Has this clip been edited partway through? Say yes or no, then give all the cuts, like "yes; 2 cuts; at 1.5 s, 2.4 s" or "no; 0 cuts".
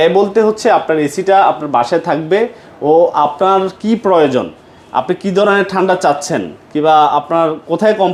no; 0 cuts